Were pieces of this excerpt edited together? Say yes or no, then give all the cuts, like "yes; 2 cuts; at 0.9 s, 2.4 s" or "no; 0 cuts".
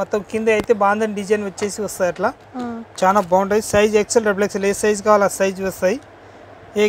no; 0 cuts